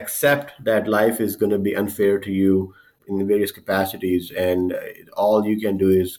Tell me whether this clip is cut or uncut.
cut